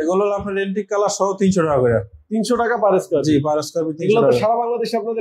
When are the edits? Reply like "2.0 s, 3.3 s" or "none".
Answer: none